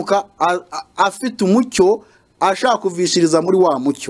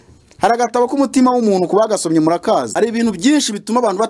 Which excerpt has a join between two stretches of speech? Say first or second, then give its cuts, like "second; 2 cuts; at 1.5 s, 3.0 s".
second; 1 cut; at 2.7 s